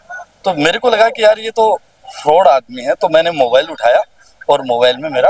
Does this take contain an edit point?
no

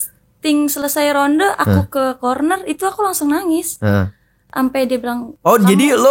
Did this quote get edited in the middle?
no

